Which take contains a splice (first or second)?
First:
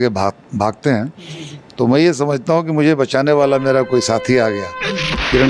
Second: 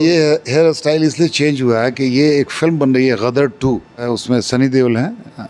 second